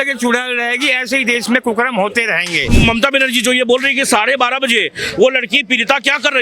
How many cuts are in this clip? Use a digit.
1